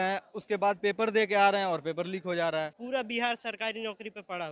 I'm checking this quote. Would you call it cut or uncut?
cut